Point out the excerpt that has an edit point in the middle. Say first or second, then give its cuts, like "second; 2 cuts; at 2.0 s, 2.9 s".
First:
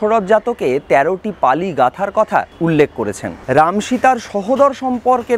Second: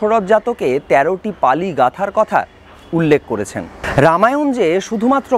first; 1 cut; at 3.1 s